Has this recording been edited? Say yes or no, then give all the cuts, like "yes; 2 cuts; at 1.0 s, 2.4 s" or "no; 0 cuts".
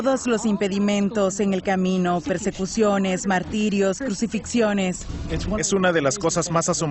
no; 0 cuts